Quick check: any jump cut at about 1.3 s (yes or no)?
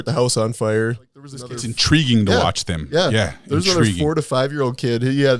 yes